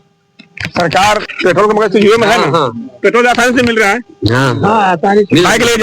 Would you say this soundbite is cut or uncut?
cut